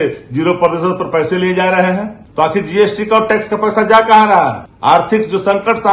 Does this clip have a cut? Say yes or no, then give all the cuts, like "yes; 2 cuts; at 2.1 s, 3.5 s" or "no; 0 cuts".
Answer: yes; 2 cuts; at 2.2 s, 4.7 s